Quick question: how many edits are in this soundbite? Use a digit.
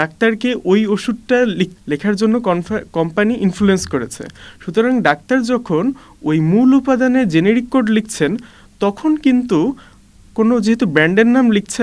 1